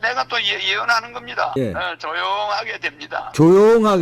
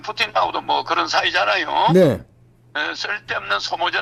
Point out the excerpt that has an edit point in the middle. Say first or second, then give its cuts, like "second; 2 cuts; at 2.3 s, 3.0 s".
first; 1 cut; at 1.6 s